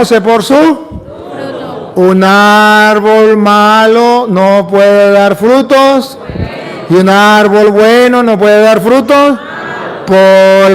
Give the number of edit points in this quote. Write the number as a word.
one